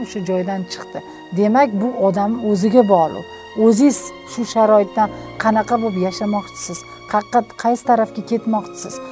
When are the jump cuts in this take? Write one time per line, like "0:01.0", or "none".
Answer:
none